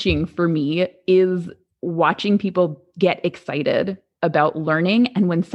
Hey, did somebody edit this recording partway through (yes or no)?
no